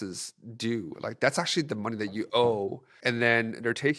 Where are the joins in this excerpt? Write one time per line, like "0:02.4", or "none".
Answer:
none